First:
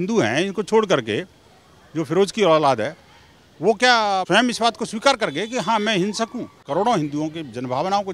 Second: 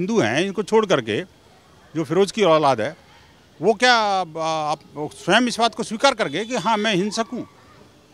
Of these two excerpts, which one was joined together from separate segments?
first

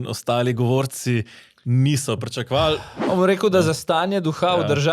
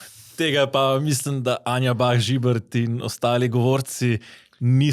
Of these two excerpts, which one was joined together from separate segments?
first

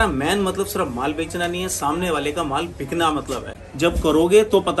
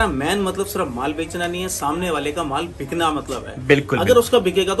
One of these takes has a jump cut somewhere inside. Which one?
first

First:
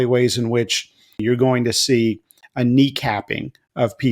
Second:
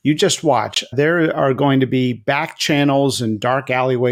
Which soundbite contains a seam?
first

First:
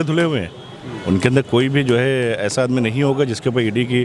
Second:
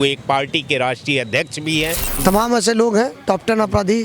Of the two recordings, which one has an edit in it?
second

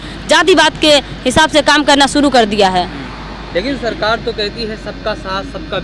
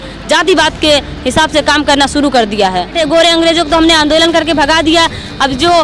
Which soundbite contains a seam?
second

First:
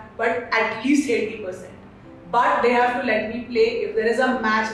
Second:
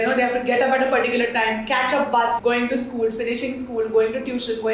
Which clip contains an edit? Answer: second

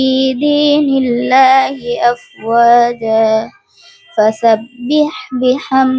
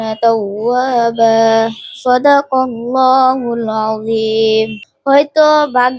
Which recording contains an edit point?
second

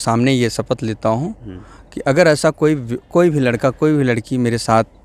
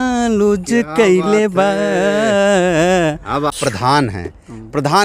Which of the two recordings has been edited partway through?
second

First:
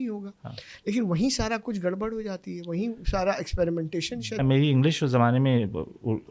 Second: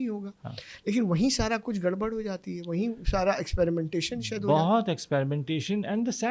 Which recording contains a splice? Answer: first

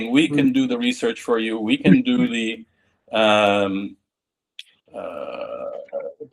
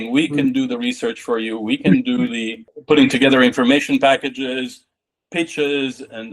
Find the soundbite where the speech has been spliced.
second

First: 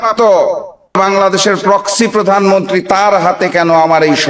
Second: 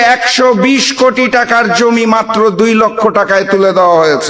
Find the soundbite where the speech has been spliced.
first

